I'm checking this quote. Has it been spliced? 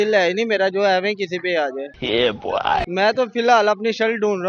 yes; 1 cut; at 2.9 s

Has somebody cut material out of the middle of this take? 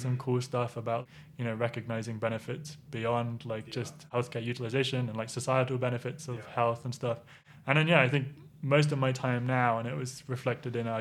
yes; 2 cuts; at 1.0 s, 4.1 s

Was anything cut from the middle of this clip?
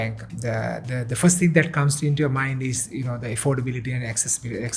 no; 0 cuts

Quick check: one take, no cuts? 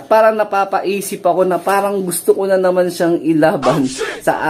yes; 0 cuts

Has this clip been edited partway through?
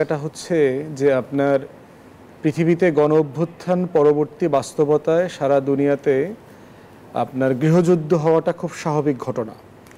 no; 0 cuts

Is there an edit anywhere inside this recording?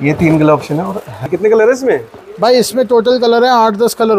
yes; 1 cut; at 1.3 s

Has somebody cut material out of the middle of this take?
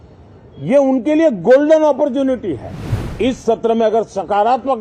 yes; 1 cut; at 3.2 s

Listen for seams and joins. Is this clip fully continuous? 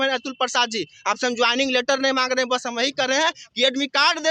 yes; 0 cuts

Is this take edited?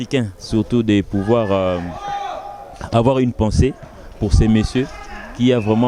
no; 0 cuts

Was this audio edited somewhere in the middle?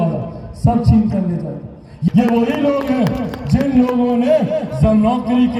yes; 1 cut; at 2.1 s

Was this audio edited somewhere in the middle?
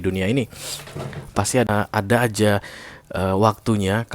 yes; 1 cut; at 1.7 s

